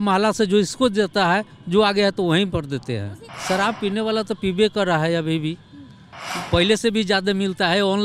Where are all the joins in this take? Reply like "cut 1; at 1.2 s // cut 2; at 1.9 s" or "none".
cut 1; at 3.3 s